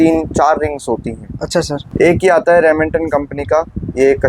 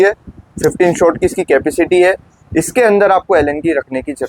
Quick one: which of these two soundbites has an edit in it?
first; 1 cut; at 1.9 s

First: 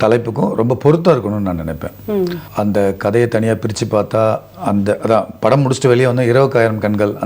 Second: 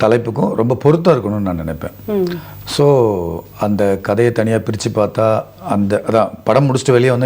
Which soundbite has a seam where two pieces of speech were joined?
first; 1 cut; at 2.4 s

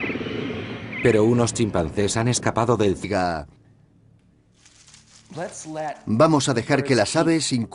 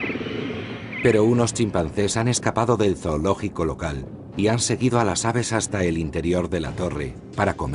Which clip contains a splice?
second; 1 cut; at 3.1 s

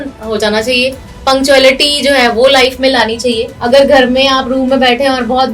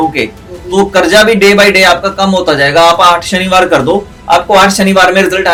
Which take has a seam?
first; 1 cut; at 3.5 s

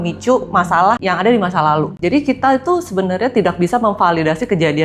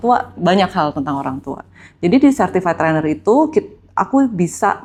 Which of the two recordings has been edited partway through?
first; 2 cuts; at 1.0 s, 1.9 s

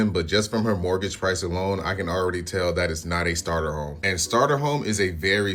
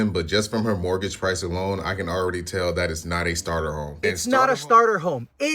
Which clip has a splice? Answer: second; 1 cut; at 3.9 s

